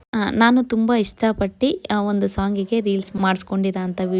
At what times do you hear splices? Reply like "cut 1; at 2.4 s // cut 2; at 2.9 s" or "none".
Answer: cut 1; at 3.1 s